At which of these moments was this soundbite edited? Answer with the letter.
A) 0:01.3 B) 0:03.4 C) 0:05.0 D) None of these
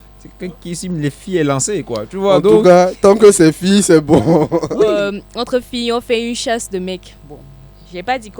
C